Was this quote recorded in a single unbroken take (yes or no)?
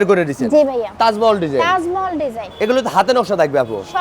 no